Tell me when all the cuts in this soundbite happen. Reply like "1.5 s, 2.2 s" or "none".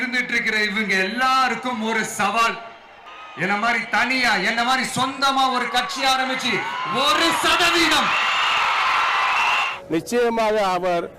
9.7 s